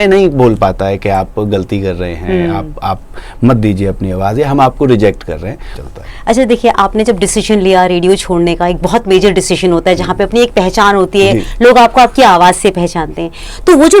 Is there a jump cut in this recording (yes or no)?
yes